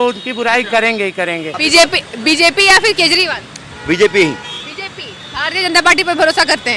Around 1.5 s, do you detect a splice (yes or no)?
yes